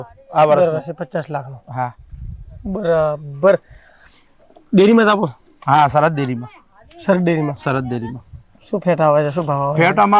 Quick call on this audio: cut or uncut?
uncut